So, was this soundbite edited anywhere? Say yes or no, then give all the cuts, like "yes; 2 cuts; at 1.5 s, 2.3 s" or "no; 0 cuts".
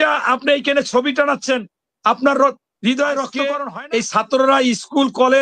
yes; 1 cut; at 3.6 s